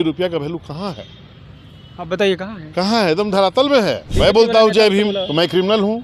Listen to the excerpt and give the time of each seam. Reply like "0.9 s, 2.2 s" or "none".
4.1 s